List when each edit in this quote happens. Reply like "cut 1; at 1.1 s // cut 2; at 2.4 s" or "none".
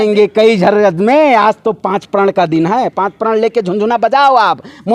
none